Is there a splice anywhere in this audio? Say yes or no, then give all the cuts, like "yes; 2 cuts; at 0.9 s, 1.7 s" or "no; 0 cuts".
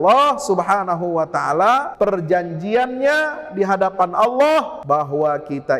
yes; 2 cuts; at 1.9 s, 4.8 s